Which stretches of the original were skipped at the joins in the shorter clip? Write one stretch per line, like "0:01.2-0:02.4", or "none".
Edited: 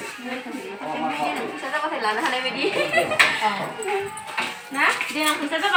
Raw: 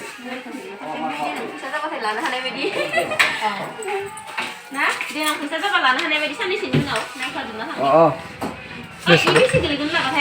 none